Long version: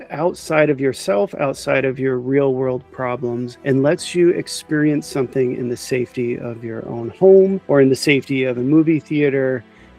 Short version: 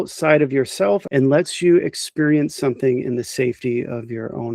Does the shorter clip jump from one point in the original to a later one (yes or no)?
yes